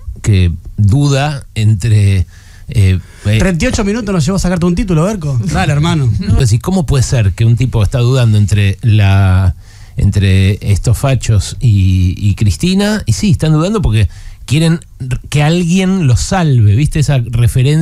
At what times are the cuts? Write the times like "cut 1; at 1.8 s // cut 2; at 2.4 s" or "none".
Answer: cut 1; at 6.4 s